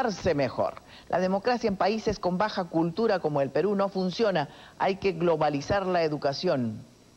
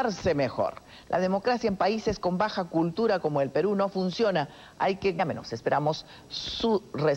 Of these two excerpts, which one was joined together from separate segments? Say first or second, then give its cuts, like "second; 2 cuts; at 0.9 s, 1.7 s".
first; 1 cut; at 5.2 s